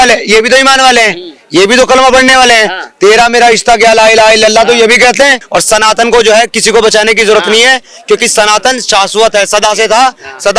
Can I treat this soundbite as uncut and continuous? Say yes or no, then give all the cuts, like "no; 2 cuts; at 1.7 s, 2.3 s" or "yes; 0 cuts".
no; 1 cut; at 5.4 s